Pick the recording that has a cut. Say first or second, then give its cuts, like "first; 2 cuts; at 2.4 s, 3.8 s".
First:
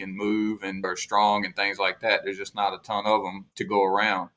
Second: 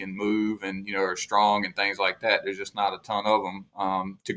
first; 2 cuts; at 0.9 s, 3.5 s